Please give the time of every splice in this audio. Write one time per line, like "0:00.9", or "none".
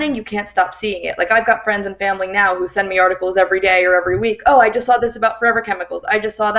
none